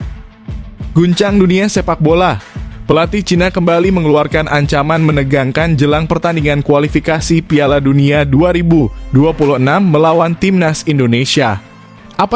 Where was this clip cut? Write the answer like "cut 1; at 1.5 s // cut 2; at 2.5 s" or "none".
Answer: cut 1; at 0.9 s